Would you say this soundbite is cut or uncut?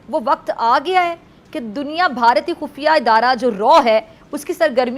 uncut